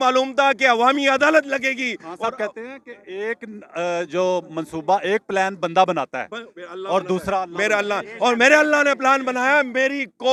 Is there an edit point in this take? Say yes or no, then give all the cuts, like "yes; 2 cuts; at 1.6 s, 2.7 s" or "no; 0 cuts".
no; 0 cuts